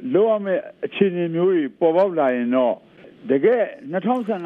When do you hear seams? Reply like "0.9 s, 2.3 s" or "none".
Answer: 3.0 s

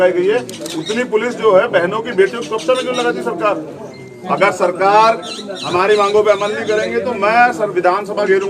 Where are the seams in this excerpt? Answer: 4.1 s

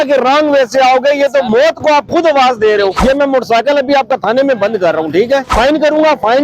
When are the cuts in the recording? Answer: 3.0 s, 5.5 s

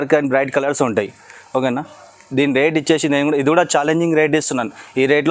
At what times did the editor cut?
none

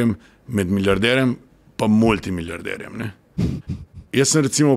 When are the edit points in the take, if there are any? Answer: none

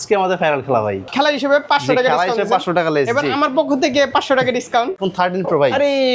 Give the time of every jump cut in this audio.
1.1 s, 5.0 s

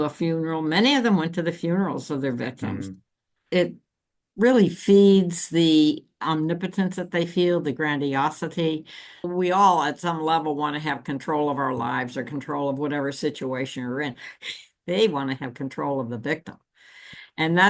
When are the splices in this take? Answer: 3.4 s, 9.3 s

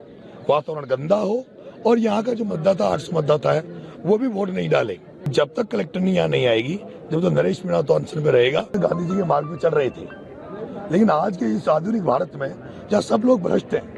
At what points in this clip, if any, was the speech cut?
5.3 s, 8.7 s

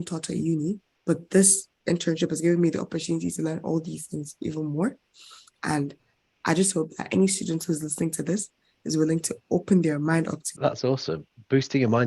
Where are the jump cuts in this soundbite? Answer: 10.5 s

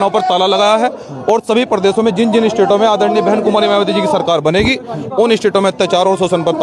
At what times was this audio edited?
none

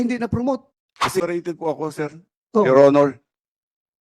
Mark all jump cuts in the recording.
1.2 s

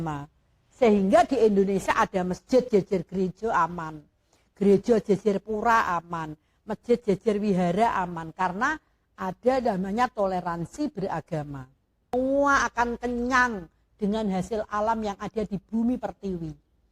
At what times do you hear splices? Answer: 12.1 s

